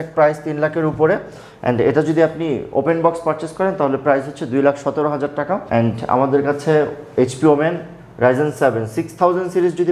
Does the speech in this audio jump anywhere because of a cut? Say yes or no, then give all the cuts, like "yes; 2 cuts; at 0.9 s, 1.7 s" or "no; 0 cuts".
no; 0 cuts